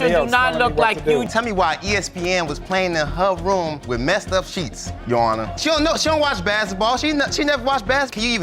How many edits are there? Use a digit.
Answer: 1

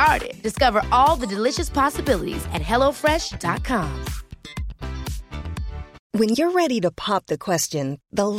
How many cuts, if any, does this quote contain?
1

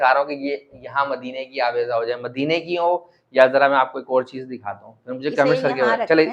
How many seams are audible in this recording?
0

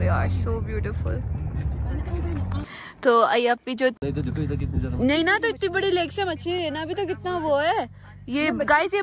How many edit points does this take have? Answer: 1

